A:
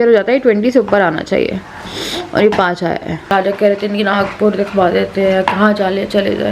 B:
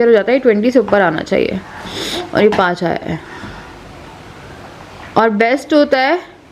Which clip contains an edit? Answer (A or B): A